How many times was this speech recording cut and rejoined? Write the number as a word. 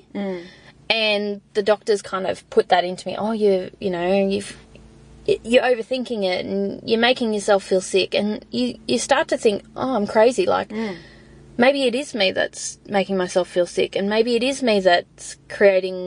zero